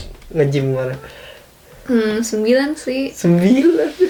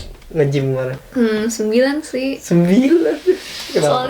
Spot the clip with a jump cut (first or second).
second